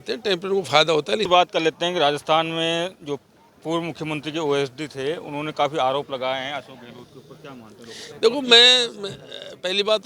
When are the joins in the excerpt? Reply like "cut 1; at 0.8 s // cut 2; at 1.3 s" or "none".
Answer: cut 1; at 1.3 s